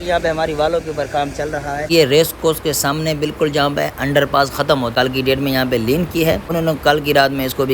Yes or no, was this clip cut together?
yes